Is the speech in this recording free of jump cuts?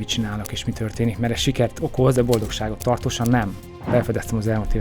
no; 2 cuts; at 2.1 s, 3.9 s

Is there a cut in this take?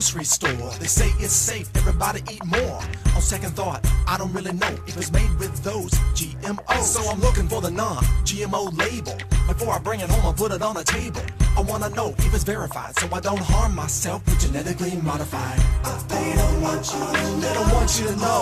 yes; 1 cut; at 16.1 s

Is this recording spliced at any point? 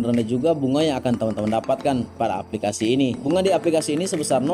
no; 0 cuts

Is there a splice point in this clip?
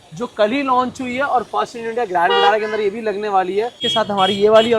yes; 1 cut; at 3.8 s

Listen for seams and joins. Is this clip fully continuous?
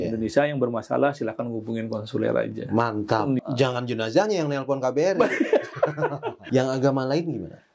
no; 2 cuts; at 3.4 s, 6.4 s

